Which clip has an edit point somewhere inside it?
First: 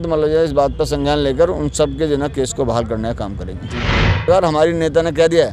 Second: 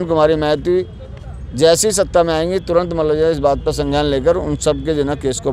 first; 1 cut; at 4.2 s

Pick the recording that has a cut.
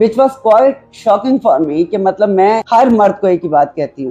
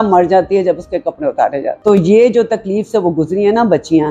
second; 1 cut; at 1.6 s

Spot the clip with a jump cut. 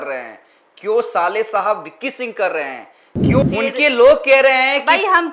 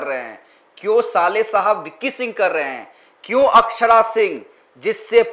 first; 1 cut; at 3.4 s

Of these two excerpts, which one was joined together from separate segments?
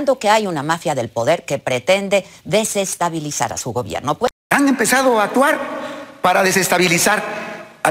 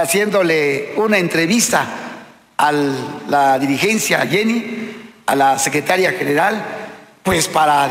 first; 1 cut; at 4.3 s

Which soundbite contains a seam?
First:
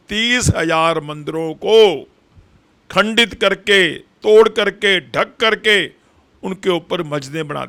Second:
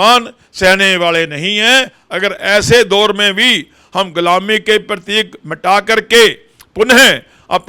second; 1 cut; at 2.0 s

